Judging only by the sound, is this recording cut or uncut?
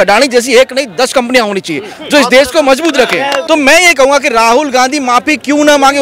cut